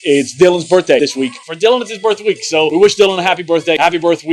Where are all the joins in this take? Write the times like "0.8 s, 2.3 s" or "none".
1.5 s